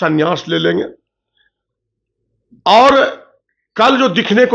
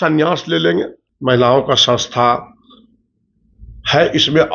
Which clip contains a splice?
second; 1 cut; at 1.1 s

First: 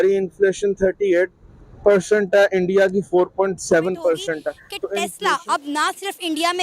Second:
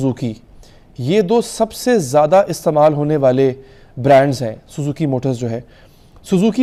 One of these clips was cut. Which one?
first; 1 cut; at 4.6 s

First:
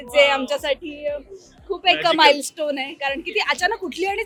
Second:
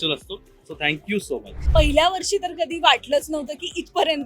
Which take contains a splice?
second; 1 cut; at 1.6 s

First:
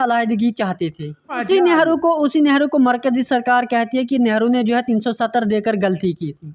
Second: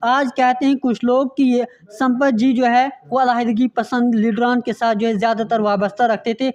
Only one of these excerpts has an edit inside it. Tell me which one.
first; 1 cut; at 1.3 s

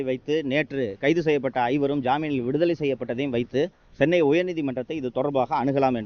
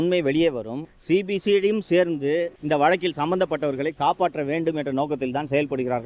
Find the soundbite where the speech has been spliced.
second; 1 cut; at 1.0 s

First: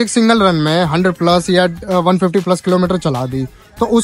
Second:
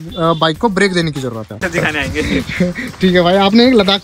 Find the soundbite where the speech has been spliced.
second; 1 cut; at 1.6 s

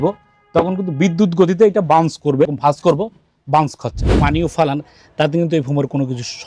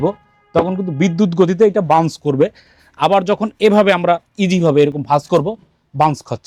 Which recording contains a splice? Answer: first; 2 cuts; at 2.5 s, 4.2 s

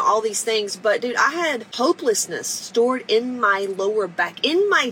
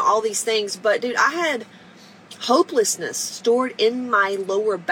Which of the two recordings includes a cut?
first; 1 cut; at 1.7 s

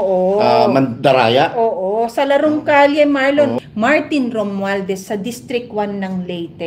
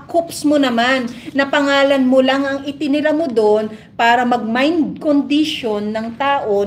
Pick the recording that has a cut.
first; 1 cut; at 3.6 s

